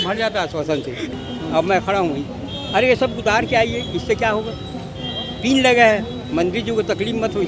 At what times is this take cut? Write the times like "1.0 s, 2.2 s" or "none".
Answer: 1.1 s